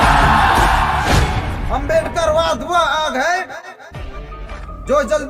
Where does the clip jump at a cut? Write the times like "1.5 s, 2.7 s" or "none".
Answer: 1.2 s